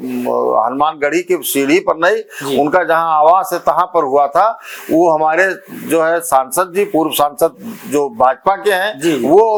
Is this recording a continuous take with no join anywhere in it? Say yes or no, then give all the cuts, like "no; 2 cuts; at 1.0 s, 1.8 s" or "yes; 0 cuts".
yes; 0 cuts